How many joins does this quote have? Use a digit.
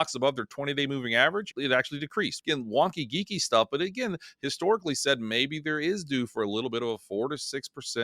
1